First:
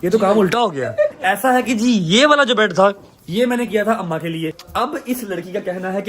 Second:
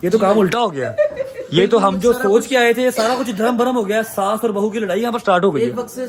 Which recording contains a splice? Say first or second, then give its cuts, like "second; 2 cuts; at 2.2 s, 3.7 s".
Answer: first; 2 cuts; at 1.2 s, 4.6 s